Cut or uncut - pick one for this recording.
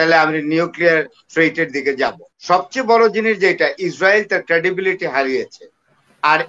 cut